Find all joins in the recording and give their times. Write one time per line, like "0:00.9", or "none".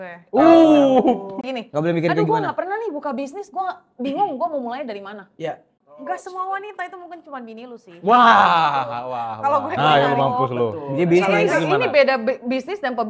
0:01.5
0:05.8
0:09.7